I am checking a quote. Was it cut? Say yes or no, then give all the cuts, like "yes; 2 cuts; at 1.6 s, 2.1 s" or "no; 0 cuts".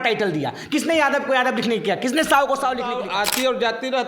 yes; 1 cut; at 2.9 s